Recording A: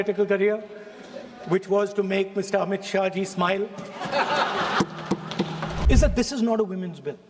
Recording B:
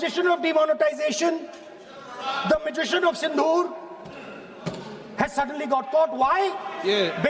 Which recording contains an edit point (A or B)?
A